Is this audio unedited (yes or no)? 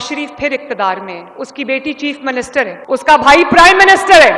yes